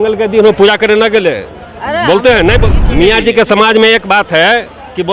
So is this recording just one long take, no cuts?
no; 1 cut; at 2.7 s

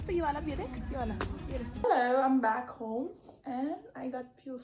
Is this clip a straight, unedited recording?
no; 1 cut; at 1.8 s

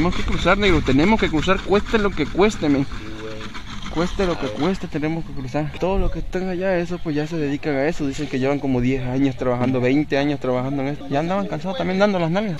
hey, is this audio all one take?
yes; 0 cuts

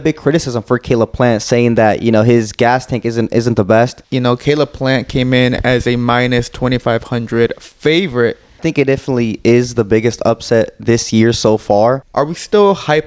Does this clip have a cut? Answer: yes; 3 cuts; at 4.0 s, 8.6 s, 12.1 s

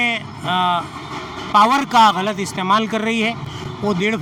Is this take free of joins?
yes; 0 cuts

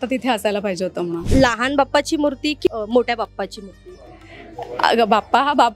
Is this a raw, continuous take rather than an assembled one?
no; 1 cut; at 1.2 s

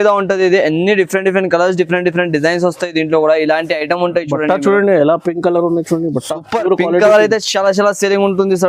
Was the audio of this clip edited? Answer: no; 0 cuts

